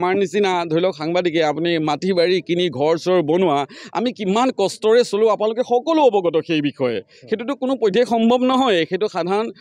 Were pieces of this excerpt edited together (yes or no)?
no